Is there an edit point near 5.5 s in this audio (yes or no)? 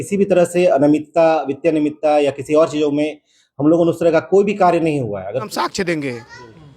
yes